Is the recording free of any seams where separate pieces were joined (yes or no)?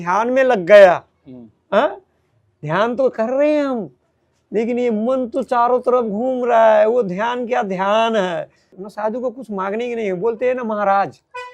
no